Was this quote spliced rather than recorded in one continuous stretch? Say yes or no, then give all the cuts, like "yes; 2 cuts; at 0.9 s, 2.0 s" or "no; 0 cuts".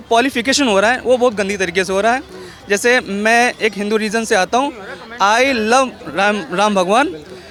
no; 0 cuts